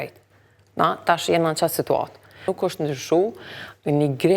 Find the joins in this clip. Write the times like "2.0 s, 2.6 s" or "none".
2.5 s